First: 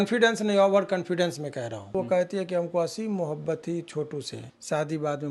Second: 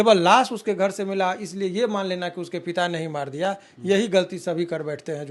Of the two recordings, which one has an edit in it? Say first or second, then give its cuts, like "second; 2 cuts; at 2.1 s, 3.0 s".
first; 2 cuts; at 1.9 s, 4.4 s